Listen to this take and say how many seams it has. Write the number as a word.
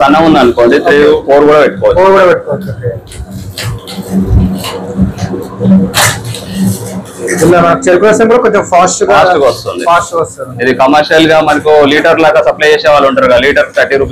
zero